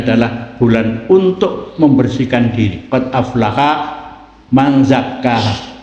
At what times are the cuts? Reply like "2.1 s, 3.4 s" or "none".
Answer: none